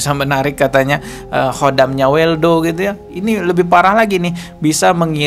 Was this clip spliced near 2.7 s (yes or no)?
no